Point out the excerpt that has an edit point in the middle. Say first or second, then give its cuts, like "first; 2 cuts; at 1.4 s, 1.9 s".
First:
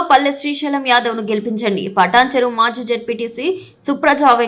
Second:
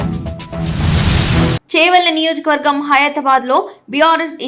second; 1 cut; at 1.5 s